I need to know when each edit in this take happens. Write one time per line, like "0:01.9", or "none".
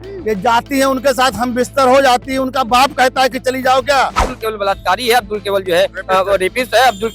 0:04.4

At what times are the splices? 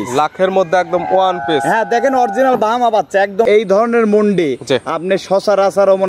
0:03.4

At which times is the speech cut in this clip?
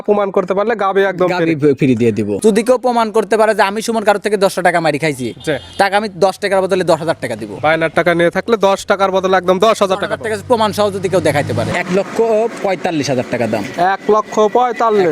0:02.3
0:11.7

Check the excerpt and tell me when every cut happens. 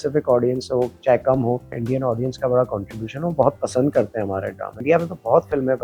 0:01.8
0:04.8

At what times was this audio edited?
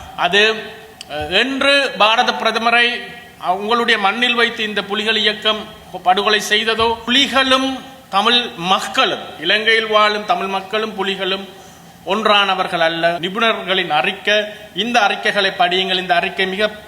0:07.0
0:13.2

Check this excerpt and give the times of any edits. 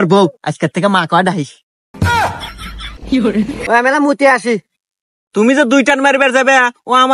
0:03.6

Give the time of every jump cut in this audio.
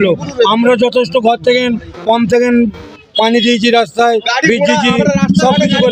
none

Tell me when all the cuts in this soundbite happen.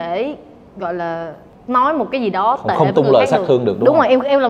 0:01.5

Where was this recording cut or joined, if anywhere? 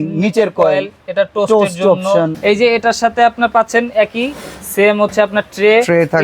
0:02.4

